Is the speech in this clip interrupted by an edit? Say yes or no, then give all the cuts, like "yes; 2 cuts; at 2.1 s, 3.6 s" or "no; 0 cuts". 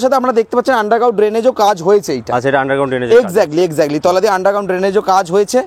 no; 0 cuts